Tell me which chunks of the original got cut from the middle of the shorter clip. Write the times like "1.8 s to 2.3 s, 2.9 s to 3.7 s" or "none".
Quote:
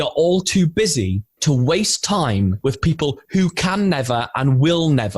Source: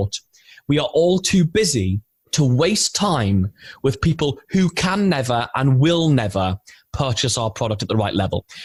2.0 s to 2.2 s, 3.5 s to 3.8 s